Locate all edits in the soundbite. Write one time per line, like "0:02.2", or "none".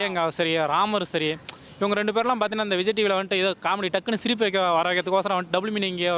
none